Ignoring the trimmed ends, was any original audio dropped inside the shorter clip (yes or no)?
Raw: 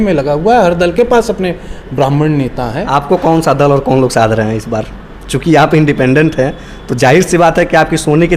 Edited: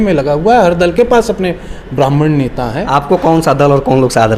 no